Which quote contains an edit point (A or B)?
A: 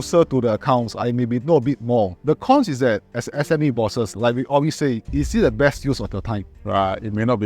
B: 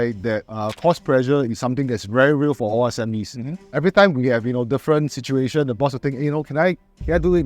A